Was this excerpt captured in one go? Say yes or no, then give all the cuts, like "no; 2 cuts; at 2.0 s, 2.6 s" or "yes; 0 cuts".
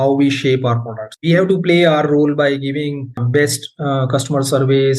no; 1 cut; at 1.1 s